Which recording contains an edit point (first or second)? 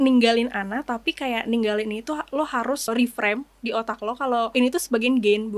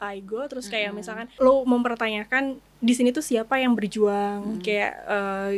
first